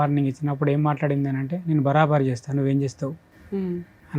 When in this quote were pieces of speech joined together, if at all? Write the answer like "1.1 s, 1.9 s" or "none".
none